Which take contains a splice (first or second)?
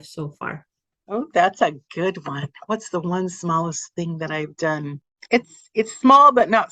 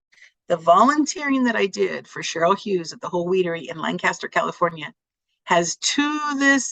first